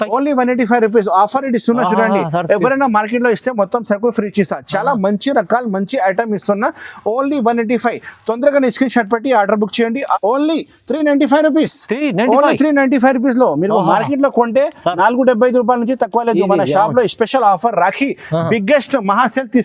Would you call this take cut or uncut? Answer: cut